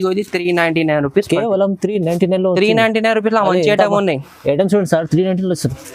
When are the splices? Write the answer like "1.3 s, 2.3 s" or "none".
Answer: none